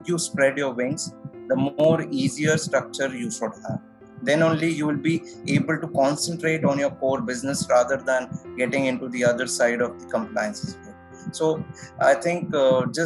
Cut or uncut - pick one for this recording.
uncut